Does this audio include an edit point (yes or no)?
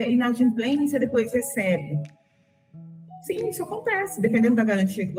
no